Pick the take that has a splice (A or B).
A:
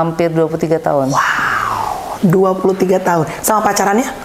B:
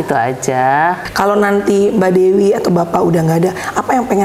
B